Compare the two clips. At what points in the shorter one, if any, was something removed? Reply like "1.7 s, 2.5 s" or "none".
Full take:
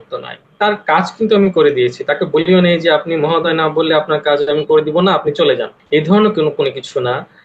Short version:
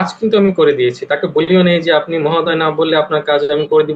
none